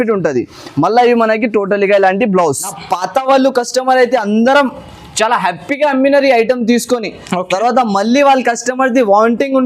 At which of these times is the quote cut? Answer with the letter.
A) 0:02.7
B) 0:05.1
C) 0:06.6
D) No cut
A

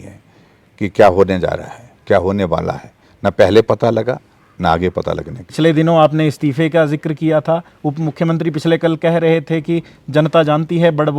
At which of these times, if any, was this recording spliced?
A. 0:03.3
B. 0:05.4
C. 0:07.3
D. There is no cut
B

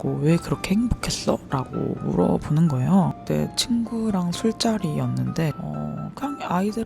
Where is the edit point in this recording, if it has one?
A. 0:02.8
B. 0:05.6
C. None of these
B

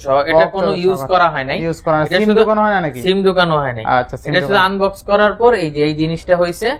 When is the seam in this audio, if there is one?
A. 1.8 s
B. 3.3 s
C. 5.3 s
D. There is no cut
D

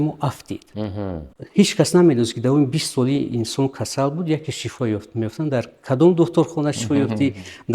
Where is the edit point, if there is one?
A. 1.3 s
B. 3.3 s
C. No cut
A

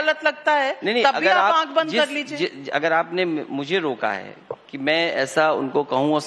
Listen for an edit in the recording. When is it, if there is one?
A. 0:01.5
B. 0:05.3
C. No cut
B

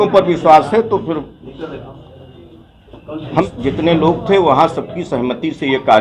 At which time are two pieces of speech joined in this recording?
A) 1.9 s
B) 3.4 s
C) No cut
B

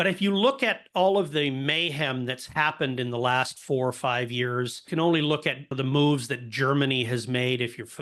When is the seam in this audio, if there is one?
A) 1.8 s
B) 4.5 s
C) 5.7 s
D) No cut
C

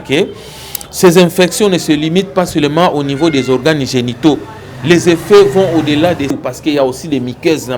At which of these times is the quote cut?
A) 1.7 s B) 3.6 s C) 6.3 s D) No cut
C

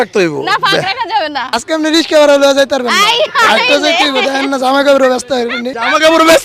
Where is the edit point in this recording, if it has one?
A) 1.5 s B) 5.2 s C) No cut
A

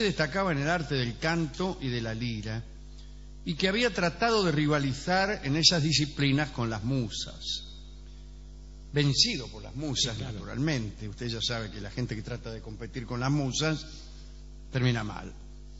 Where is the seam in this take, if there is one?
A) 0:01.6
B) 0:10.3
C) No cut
B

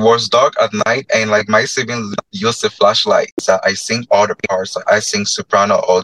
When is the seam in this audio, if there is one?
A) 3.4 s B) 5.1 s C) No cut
A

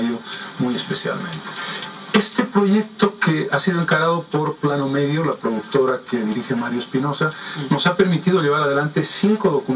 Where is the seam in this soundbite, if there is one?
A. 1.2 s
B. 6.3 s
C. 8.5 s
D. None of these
A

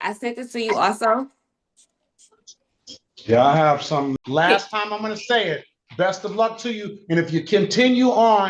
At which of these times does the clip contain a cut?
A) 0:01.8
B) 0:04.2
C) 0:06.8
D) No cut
B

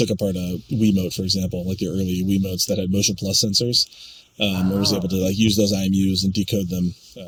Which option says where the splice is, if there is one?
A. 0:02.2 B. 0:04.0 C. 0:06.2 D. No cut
D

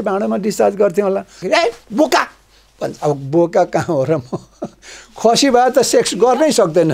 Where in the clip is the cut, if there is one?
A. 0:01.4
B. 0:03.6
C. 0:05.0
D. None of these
A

